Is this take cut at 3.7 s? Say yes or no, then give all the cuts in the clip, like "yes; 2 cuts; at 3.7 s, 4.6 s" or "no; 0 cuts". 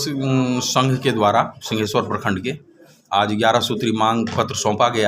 no; 0 cuts